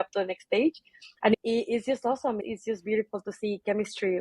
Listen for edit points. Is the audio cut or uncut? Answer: cut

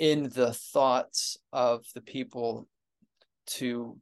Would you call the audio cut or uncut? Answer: uncut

